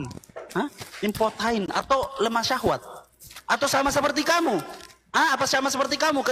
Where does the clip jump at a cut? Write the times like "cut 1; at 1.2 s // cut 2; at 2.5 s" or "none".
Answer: none